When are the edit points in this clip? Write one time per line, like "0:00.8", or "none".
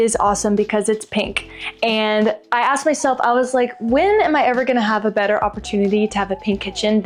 none